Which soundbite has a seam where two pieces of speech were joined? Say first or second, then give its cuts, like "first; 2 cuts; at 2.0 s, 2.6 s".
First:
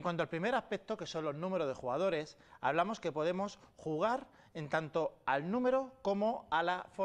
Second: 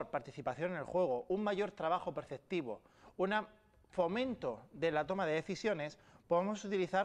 second; 1 cut; at 2.0 s